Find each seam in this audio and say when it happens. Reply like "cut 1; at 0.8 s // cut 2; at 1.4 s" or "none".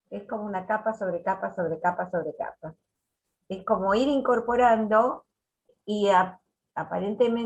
cut 1; at 5.7 s